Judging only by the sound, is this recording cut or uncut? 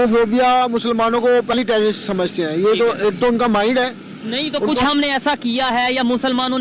cut